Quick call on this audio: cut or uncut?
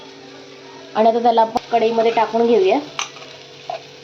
cut